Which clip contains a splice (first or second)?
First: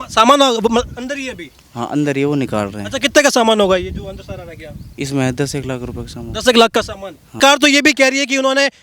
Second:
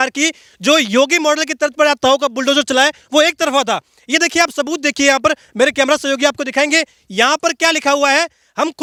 first